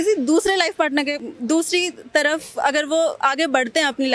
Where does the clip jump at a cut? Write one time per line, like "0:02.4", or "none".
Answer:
0:01.3